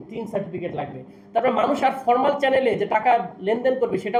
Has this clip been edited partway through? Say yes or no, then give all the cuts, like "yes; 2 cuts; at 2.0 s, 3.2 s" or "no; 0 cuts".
no; 0 cuts